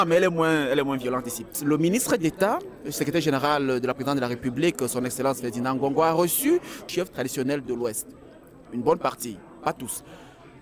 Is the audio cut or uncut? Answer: cut